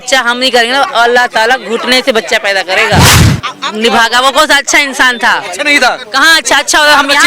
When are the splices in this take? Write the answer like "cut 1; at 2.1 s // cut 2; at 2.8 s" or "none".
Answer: cut 1; at 3.1 s